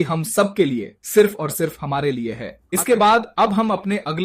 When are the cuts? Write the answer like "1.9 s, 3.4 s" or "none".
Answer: 2.6 s